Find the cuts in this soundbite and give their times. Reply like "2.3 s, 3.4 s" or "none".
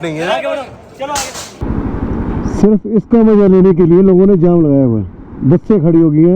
1.6 s